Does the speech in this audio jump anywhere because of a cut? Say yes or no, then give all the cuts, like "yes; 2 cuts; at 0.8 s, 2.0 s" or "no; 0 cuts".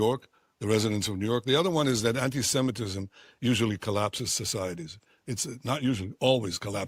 no; 0 cuts